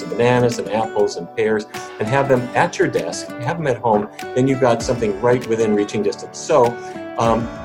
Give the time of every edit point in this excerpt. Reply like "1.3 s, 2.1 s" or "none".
none

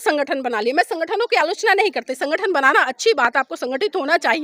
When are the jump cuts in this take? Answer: none

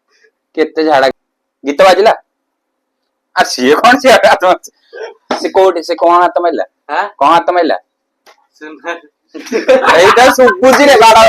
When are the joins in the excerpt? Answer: 1.1 s

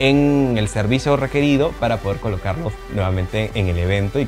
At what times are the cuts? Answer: none

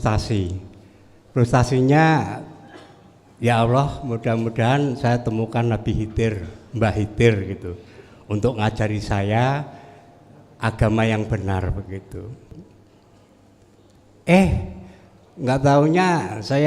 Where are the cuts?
12.6 s

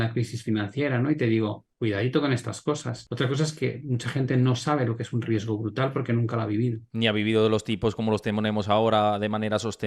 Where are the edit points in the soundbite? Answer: 3.0 s

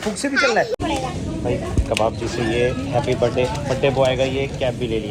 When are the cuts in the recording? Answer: 1.0 s

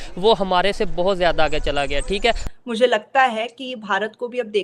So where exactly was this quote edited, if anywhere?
2.4 s

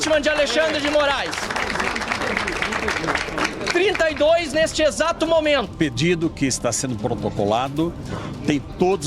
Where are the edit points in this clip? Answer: 5.7 s

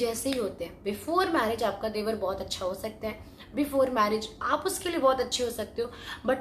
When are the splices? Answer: none

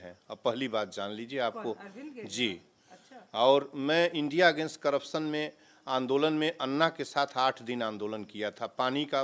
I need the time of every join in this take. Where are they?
none

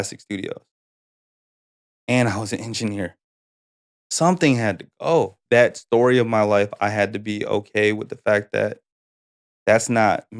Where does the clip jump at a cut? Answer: 5.4 s

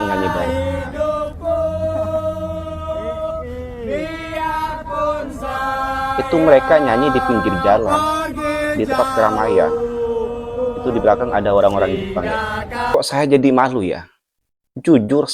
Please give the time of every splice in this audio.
12.9 s

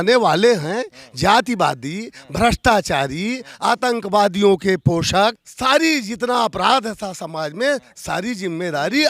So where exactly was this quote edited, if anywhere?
5.5 s

